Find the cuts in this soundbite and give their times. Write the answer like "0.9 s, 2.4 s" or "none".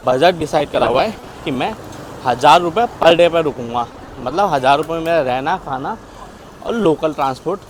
none

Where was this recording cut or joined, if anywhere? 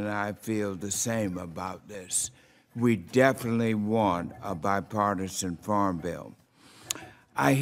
1.1 s, 6.1 s

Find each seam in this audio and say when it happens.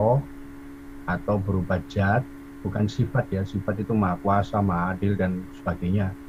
none

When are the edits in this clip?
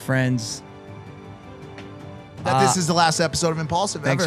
none

